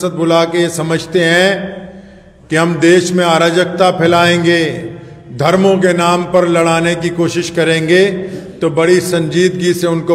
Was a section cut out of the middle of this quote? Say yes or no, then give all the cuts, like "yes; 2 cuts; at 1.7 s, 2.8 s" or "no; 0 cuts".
no; 0 cuts